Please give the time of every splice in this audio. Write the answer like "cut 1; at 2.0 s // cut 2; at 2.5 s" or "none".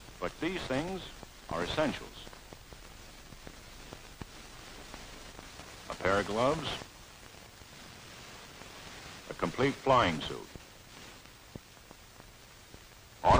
cut 1; at 5.1 s